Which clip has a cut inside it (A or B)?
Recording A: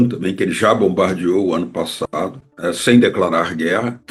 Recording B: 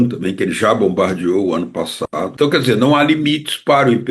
B